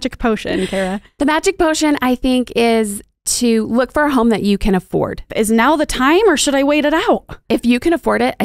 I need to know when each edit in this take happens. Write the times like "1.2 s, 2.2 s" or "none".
5.3 s, 7.3 s